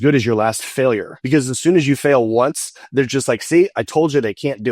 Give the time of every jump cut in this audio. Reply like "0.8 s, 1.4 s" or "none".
1.1 s